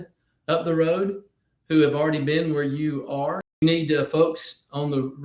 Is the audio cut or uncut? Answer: cut